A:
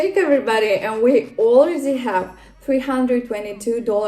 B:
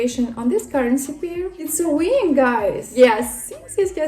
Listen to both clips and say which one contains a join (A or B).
B